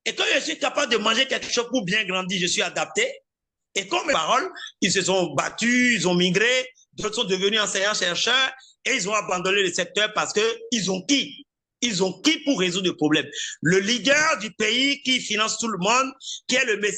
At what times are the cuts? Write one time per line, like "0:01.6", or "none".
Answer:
0:04.1